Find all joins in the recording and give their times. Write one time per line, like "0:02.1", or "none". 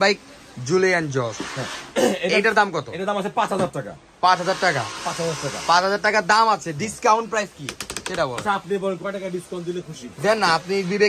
none